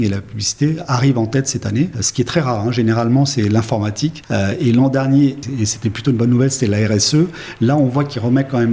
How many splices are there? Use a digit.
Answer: 3